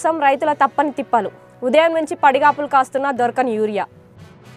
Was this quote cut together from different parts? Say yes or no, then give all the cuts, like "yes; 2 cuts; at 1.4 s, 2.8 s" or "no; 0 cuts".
no; 0 cuts